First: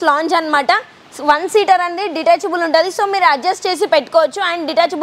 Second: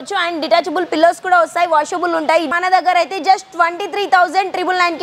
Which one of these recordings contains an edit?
second; 1 cut; at 2.5 s

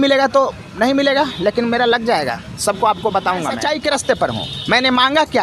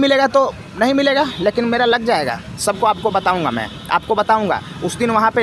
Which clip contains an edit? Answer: first; 1 cut; at 3.6 s

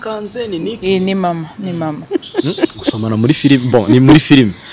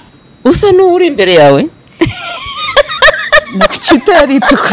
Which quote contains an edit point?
first; 1 cut; at 2.0 s

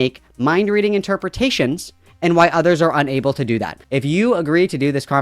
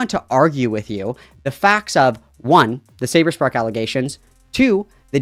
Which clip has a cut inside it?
first; 1 cut; at 3.8 s

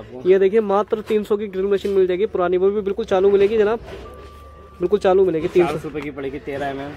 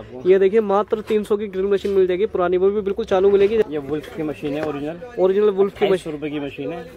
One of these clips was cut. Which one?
second; 1 cut; at 3.6 s

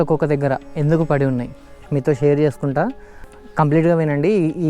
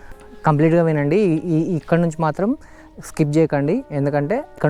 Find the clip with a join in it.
first; 1 cut; at 1.8 s

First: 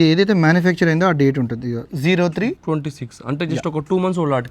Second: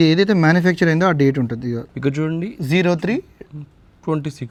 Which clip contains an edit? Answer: first; 2 cuts; at 1.9 s, 2.6 s

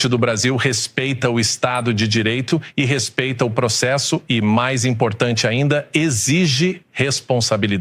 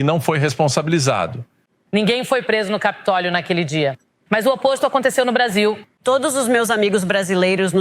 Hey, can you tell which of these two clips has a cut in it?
second; 2 cuts; at 1.7 s, 5.9 s

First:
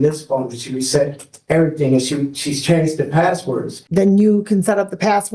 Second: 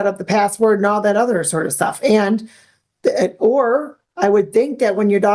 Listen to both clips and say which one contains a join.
first; 1 cut; at 3.8 s

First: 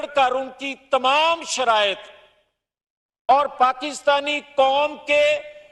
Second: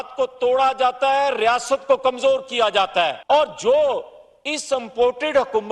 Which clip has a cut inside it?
second; 1 cut; at 3.2 s

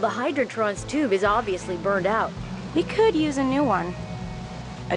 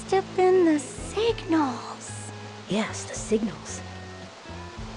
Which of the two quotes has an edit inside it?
second; 2 cuts; at 1.1 s, 3.5 s

